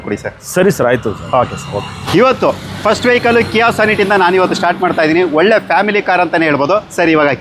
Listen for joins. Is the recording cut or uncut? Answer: uncut